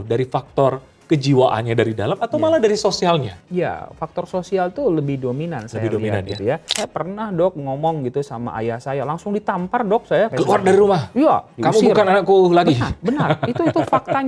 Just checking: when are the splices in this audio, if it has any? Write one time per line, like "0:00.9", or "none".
0:03.4
0:06.7
0:10.3

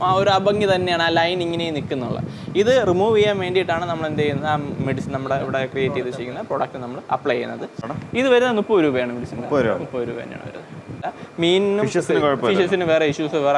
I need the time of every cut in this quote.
0:07.9
0:11.2

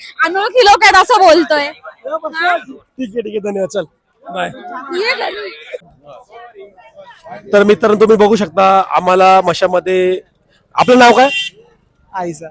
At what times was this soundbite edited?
none

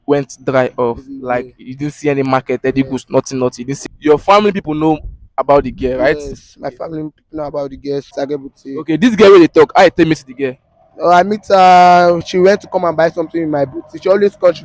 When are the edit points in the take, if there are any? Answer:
0:03.7
0:08.1

